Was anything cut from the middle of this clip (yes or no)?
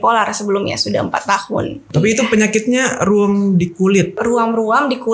yes